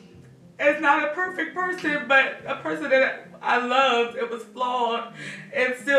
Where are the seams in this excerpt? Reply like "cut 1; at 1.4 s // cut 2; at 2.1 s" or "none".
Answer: none